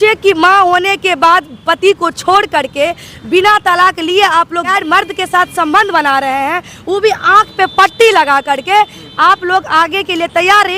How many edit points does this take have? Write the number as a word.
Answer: one